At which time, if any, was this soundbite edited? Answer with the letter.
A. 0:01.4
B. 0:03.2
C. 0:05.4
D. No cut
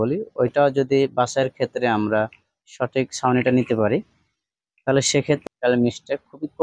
C